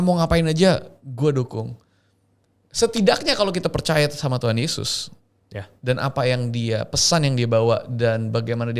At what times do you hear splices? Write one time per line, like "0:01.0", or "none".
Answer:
none